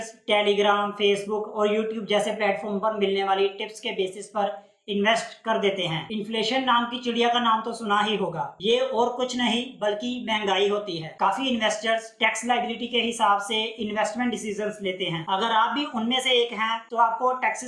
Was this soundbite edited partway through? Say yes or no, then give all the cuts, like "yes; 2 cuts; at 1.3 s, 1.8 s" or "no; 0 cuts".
yes; 2 cuts; at 6.0 s, 11.0 s